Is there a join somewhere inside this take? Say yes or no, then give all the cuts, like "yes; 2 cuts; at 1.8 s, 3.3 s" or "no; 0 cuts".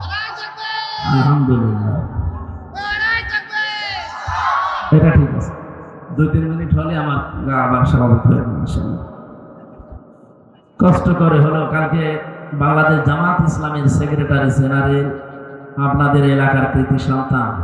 yes; 1 cut; at 10.6 s